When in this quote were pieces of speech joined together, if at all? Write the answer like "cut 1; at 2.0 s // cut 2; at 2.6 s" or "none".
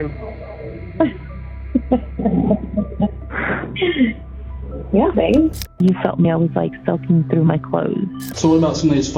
cut 1; at 5.8 s // cut 2; at 8.2 s

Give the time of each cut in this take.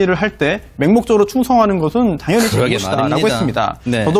cut 1; at 1.7 s

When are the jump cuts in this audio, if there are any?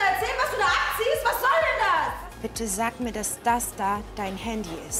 cut 1; at 2.1 s

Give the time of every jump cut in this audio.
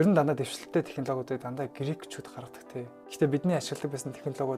cut 1; at 3.0 s

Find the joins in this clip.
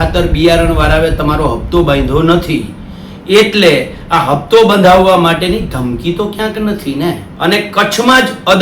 cut 1; at 7.3 s

